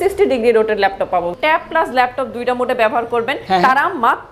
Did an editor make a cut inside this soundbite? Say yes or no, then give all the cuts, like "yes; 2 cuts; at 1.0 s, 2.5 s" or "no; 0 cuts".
yes; 2 cuts; at 1.3 s, 3.4 s